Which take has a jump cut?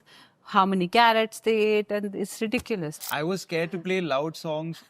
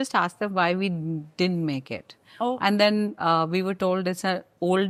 first; 1 cut; at 2.9 s

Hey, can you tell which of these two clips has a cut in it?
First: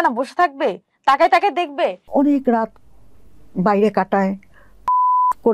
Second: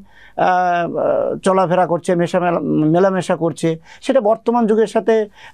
first; 1 cut; at 2.0 s

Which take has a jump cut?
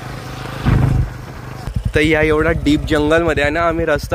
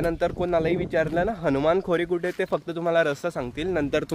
first; 1 cut; at 1.7 s

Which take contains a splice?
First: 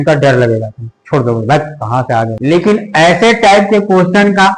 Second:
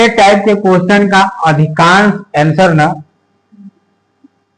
first; 1 cut; at 2.3 s

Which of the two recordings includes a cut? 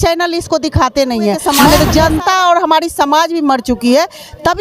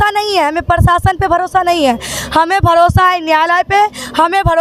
first; 1 cut; at 1.5 s

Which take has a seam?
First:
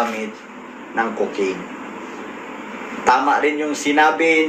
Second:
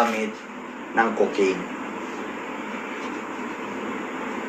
first; 1 cut; at 2.9 s

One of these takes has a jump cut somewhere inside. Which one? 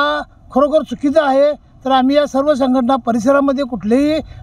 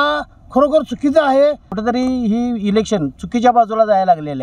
second; 1 cut; at 1.7 s

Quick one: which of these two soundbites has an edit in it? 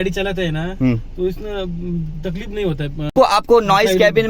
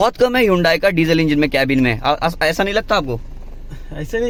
first; 1 cut; at 3.1 s

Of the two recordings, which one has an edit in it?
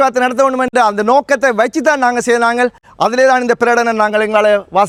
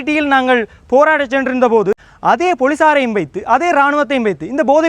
second; 1 cut; at 2.1 s

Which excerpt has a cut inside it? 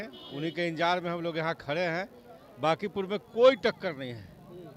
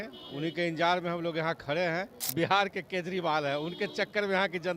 second; 1 cut; at 2.2 s

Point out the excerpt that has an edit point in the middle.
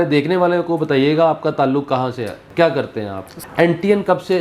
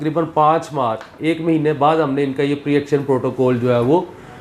first; 2 cuts; at 2.4 s, 3.3 s

